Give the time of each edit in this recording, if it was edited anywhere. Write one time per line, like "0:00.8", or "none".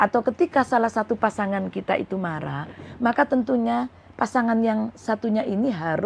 none